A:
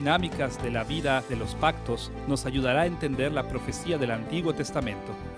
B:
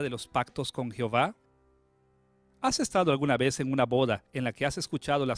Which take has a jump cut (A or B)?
A